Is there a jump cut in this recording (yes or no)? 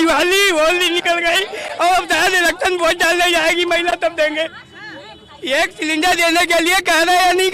no